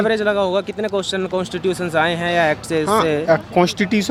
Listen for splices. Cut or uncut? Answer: uncut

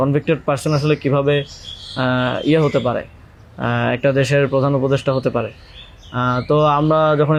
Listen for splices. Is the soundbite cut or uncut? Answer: uncut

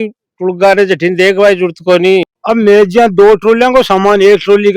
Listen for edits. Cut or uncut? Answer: cut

